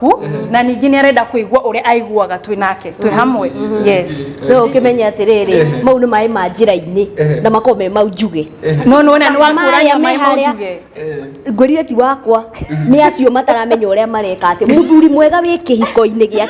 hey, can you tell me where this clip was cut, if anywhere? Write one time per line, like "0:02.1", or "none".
none

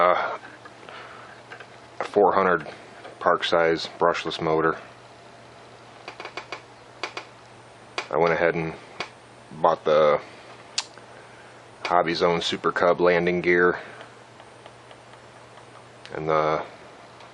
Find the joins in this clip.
0:13.5

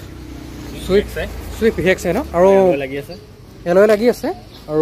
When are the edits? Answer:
none

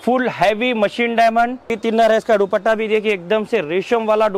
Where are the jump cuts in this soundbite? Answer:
0:01.7

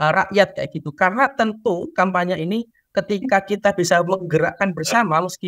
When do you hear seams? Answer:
none

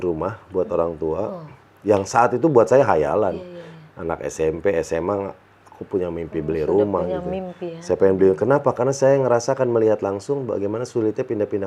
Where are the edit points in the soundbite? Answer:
none

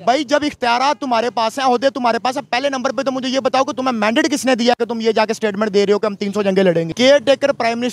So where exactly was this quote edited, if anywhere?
0:06.9

